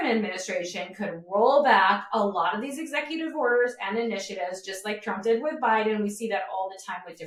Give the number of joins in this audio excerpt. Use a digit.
0